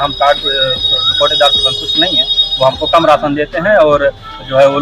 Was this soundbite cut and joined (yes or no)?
no